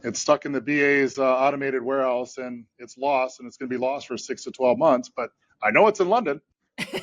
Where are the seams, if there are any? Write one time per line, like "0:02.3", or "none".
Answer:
none